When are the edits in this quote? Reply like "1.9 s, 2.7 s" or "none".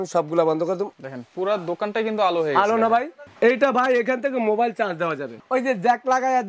0.9 s, 3.2 s, 5.3 s